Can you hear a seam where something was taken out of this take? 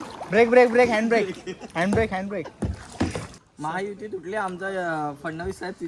yes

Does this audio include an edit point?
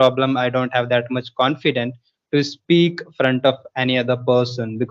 no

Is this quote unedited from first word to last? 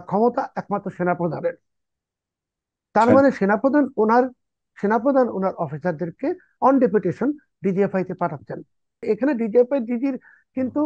no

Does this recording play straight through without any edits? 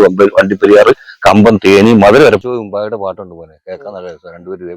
no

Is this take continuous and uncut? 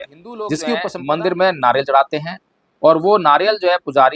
no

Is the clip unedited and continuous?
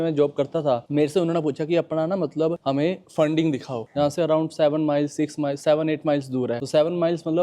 no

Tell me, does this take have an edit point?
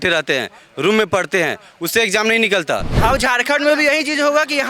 yes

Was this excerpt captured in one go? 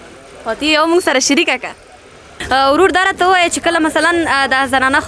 no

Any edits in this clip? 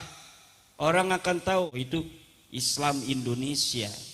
yes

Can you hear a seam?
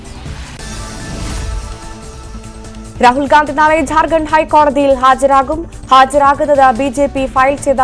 no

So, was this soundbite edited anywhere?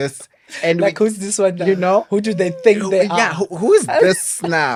no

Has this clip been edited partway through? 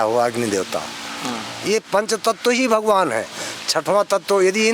no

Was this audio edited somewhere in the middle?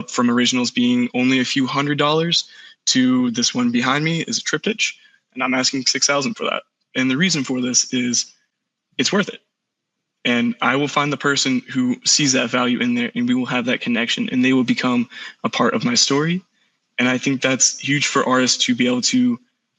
no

